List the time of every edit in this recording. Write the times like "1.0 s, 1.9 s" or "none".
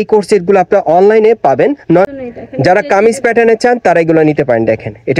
2.1 s